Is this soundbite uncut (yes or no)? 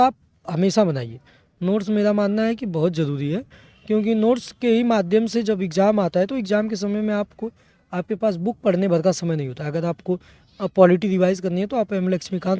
yes